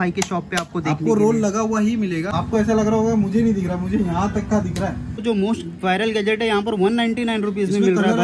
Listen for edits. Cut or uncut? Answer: cut